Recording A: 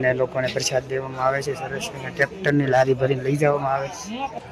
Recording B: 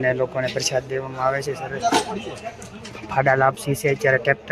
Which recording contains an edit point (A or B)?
B